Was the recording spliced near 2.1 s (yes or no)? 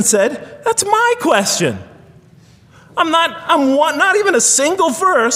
no